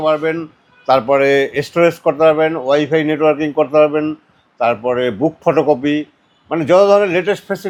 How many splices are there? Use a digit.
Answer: 0